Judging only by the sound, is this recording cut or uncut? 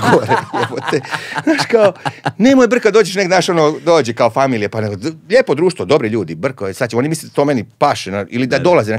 uncut